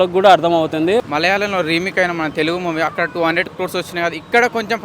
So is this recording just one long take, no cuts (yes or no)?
no